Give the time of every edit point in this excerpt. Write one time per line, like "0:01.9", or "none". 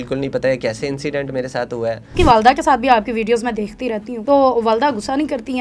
0:02.1
0:04.1